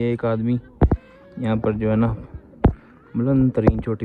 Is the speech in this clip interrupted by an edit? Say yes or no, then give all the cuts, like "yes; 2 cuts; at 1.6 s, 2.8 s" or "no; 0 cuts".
no; 0 cuts